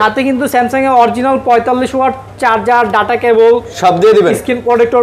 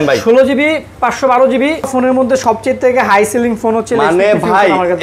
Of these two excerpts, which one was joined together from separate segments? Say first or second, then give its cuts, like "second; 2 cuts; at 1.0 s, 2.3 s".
second; 1 cut; at 1.9 s